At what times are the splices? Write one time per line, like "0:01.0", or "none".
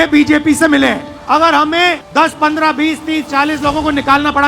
0:01.1
0:02.0